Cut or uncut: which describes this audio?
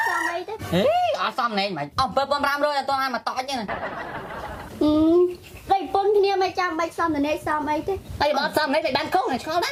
uncut